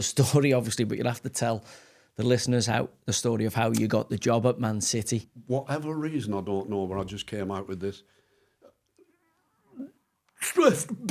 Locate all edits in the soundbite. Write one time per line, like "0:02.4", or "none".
0:05.3